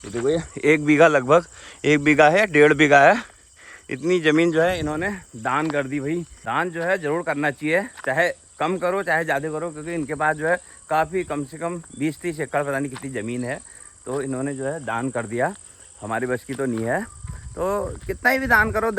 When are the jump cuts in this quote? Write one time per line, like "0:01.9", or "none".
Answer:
none